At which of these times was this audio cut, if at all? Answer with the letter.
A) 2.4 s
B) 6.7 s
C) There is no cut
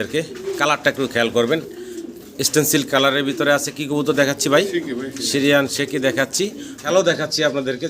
B